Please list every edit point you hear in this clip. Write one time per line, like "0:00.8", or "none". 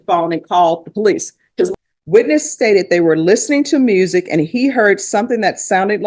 0:01.7